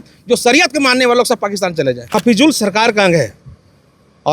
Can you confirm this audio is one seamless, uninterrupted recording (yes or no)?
no